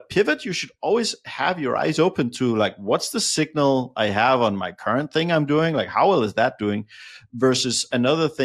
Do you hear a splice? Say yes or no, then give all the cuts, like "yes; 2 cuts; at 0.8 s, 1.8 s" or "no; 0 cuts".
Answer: no; 0 cuts